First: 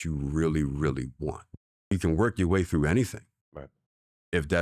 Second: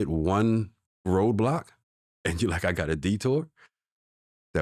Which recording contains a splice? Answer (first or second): first